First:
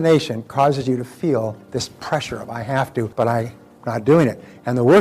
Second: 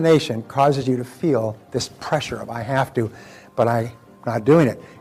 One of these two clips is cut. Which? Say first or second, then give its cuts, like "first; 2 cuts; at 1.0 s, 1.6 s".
first; 1 cut; at 3.1 s